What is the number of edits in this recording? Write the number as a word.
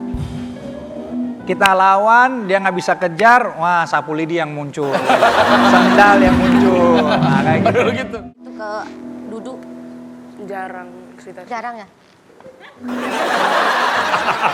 one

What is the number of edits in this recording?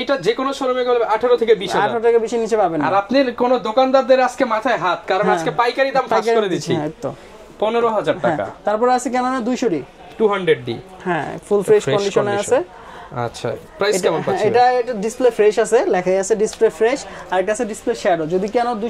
zero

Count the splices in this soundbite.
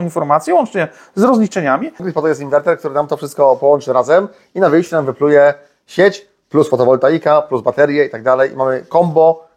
one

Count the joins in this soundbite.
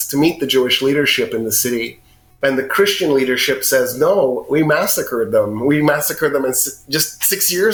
zero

